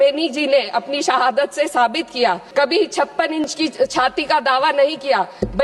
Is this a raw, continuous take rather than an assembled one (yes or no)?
no